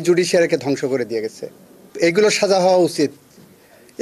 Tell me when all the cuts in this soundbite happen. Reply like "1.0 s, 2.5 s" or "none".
1.9 s